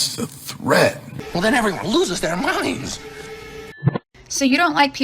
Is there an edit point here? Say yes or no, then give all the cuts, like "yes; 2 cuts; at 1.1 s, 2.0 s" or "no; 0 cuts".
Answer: yes; 2 cuts; at 1.1 s, 3.7 s